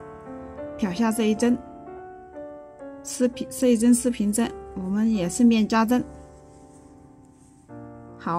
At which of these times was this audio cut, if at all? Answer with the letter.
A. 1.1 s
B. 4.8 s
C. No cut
C